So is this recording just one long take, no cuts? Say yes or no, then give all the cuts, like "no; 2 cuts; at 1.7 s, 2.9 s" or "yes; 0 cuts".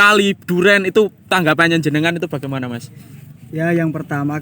no; 1 cut; at 3.0 s